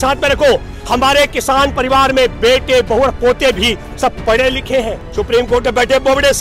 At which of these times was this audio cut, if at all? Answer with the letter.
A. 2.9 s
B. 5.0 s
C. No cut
B